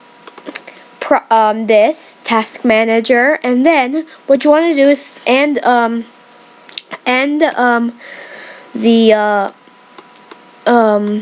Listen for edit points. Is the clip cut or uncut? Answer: cut